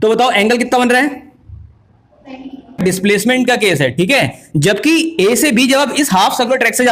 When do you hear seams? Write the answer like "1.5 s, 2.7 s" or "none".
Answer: 2.8 s